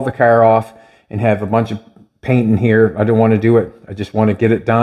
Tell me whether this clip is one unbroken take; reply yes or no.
yes